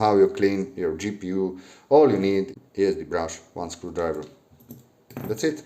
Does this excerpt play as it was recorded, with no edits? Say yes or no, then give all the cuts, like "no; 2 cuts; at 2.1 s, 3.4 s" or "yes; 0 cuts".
no; 1 cut; at 2.6 s